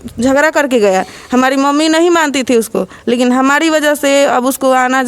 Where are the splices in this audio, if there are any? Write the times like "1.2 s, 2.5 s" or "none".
none

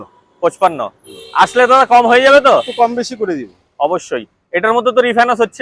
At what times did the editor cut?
none

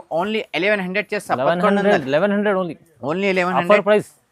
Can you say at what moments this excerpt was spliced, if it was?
none

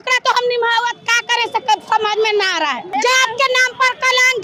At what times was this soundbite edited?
none

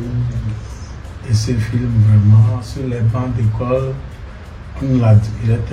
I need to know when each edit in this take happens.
2.7 s

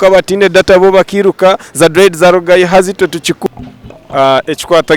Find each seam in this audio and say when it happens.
3.4 s

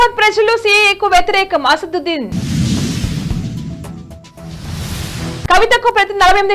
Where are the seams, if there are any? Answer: none

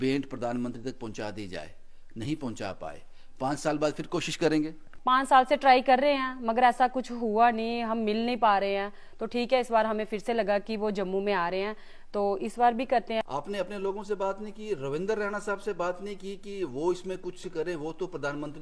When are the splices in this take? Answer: 4.9 s, 13.2 s

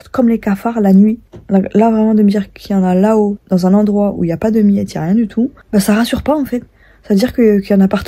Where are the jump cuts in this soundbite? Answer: 1.3 s, 3.4 s, 5.6 s

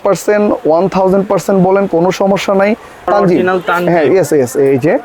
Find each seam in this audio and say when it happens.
3.1 s

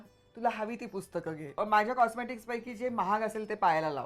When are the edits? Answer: 1.6 s

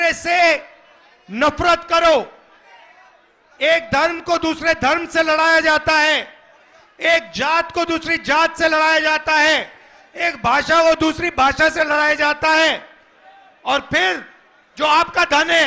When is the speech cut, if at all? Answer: none

